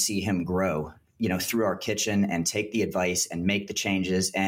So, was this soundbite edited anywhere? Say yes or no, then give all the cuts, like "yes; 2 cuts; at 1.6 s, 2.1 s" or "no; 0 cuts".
no; 0 cuts